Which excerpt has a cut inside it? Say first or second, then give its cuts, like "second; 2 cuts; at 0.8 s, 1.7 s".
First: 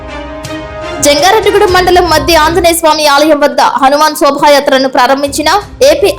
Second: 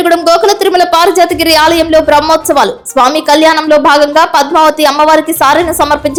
first; 1 cut; at 0.9 s